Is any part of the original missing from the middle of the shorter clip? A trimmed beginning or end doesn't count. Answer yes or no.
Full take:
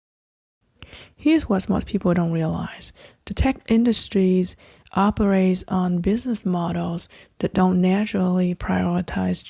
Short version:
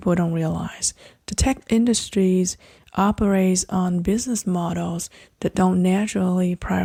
no